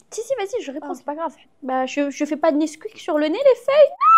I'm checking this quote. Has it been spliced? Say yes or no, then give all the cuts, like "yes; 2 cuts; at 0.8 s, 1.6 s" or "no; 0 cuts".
yes; 1 cut; at 1.4 s